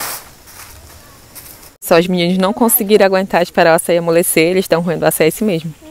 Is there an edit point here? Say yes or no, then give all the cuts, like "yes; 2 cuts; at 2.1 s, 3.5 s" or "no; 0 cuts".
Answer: yes; 1 cut; at 1.7 s